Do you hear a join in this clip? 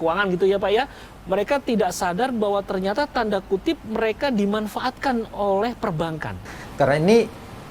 yes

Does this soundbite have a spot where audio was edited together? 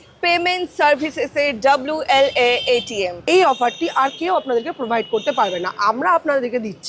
yes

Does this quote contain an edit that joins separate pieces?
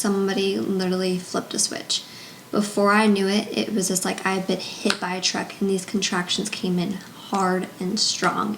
no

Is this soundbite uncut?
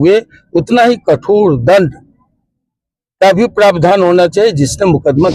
yes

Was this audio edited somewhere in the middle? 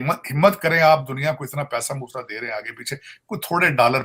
no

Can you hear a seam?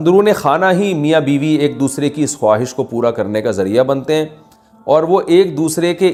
no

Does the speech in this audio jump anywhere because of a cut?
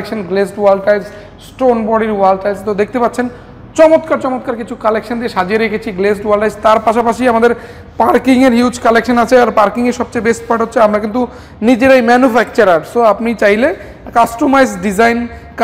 no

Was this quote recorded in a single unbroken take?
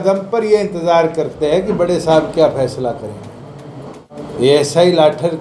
no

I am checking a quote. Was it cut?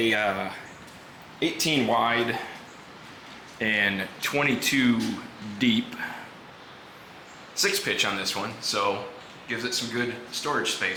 no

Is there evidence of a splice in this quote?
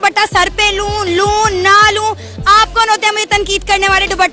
no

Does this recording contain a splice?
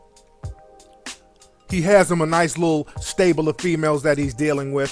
yes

